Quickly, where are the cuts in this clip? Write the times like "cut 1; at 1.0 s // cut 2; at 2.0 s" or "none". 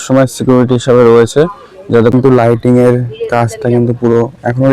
cut 1; at 2.1 s